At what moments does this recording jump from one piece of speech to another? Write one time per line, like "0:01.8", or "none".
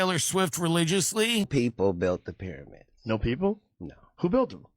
0:01.5